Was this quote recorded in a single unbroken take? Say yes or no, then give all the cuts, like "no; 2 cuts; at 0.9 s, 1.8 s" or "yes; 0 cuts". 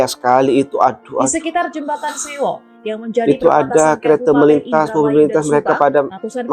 yes; 0 cuts